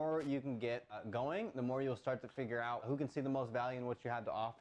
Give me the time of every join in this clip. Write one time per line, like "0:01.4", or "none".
0:01.0
0:02.8